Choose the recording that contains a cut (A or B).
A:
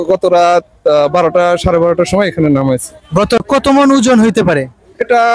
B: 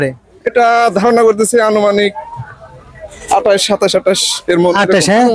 A